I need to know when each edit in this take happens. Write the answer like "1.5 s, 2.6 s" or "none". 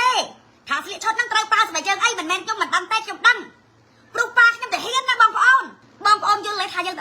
5.8 s